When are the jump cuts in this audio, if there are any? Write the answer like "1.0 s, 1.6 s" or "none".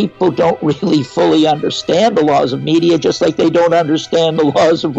none